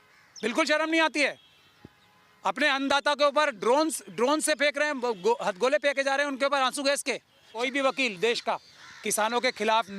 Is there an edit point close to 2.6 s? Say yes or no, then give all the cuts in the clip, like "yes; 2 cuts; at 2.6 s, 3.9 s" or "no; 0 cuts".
no; 1 cut; at 7.6 s